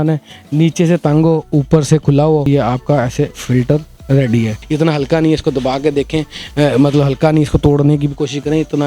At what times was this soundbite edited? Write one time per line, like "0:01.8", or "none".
0:02.5
0:04.6